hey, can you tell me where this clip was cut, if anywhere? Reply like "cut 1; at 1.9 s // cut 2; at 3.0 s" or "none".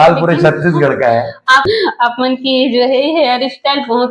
cut 1; at 1.6 s